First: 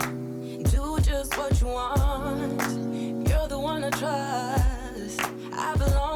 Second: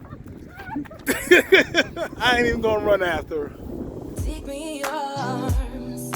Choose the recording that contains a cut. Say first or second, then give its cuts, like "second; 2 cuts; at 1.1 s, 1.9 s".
second; 2 cuts; at 2.0 s, 4.2 s